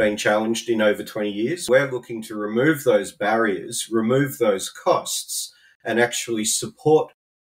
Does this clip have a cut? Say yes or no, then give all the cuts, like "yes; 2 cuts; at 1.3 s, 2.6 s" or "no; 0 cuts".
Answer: yes; 1 cut; at 1.6 s